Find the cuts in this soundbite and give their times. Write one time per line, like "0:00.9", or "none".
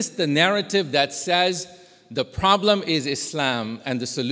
none